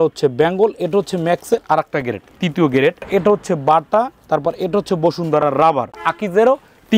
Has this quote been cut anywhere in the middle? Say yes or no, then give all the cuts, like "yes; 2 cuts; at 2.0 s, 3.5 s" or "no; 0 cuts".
yes; 2 cuts; at 3.1 s, 6.0 s